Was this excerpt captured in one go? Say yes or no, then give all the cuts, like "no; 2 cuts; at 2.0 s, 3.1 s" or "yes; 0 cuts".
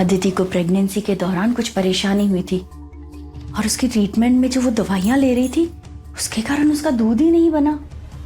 no; 1 cut; at 1.6 s